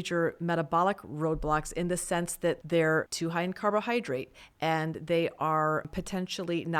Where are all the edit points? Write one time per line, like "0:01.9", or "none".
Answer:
0:02.6
0:03.1
0:05.9